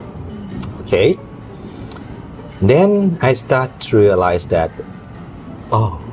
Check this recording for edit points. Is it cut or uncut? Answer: uncut